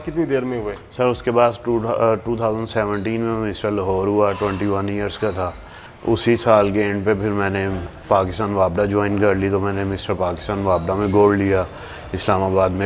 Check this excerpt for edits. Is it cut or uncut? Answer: uncut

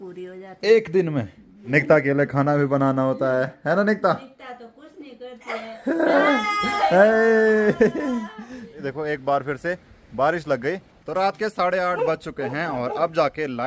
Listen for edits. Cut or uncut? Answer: cut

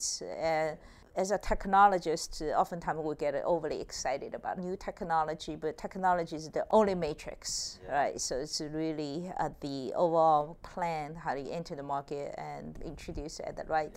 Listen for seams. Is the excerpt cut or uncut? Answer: cut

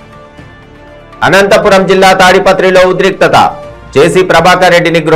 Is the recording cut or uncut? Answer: cut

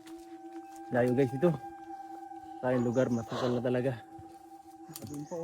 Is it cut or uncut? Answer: cut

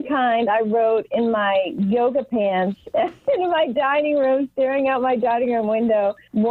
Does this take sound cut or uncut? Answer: uncut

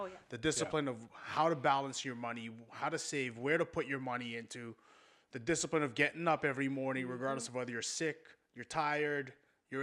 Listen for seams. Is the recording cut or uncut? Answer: uncut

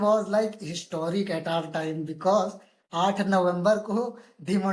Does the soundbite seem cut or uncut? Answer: uncut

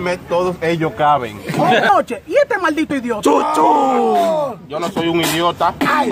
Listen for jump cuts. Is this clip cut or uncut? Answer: cut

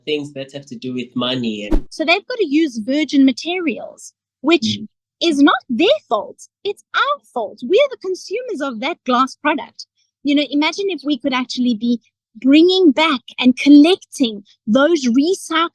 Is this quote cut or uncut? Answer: cut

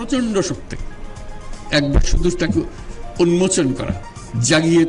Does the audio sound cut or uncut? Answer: uncut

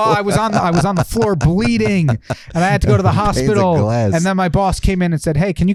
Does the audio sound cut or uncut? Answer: uncut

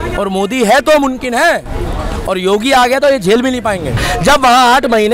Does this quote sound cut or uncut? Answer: cut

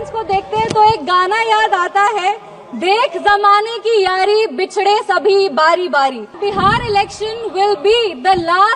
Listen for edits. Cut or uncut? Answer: cut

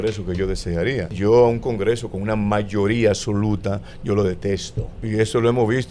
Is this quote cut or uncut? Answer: cut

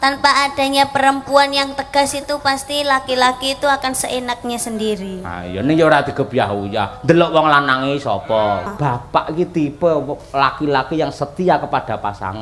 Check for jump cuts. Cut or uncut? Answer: cut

